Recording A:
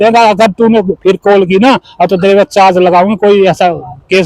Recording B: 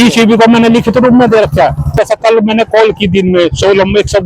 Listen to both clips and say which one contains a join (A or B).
B